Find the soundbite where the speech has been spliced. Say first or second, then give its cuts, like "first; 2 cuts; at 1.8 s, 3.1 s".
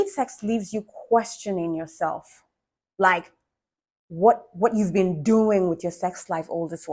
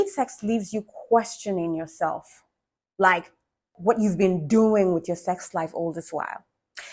second; 1 cut; at 3.7 s